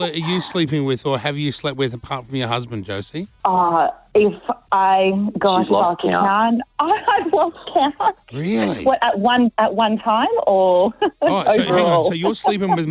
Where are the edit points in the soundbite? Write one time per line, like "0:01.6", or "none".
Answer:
none